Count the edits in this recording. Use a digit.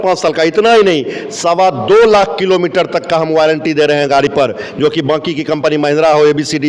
0